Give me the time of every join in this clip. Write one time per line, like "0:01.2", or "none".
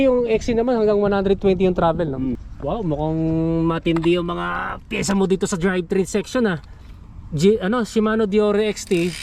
0:02.5